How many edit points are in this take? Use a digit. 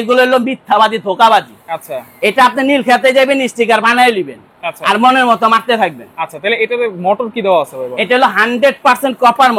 0